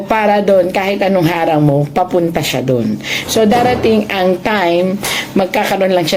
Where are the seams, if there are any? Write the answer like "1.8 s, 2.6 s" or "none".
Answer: none